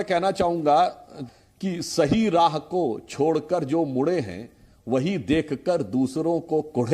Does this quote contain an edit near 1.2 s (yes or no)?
yes